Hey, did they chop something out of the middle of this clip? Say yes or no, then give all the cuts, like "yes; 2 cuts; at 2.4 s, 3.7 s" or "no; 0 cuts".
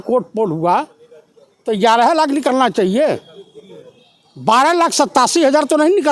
no; 0 cuts